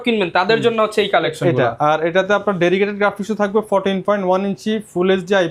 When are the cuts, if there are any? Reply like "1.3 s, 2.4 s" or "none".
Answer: none